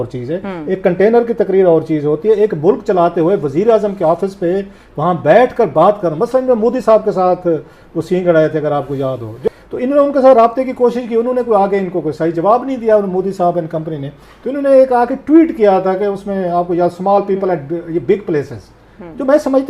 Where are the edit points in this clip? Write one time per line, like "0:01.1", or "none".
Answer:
0:09.4